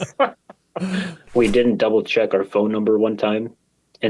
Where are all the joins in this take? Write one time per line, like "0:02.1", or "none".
0:01.2